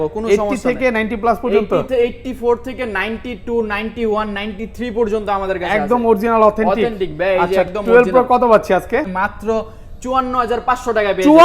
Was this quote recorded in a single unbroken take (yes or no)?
no